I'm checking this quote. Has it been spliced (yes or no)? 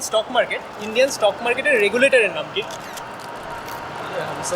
no